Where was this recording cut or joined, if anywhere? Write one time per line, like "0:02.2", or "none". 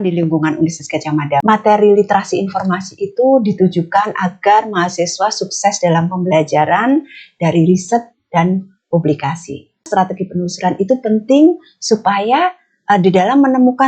0:01.4
0:09.9